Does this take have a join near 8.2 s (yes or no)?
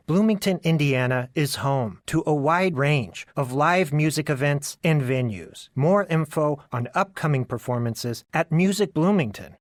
no